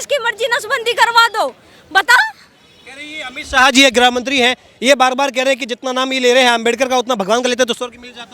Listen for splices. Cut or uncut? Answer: uncut